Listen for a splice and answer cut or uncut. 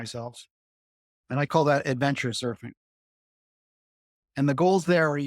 cut